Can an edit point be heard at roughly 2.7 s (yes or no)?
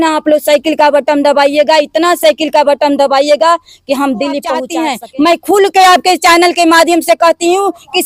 no